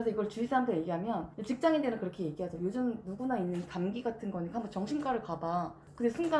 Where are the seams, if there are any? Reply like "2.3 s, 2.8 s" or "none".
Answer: 1.3 s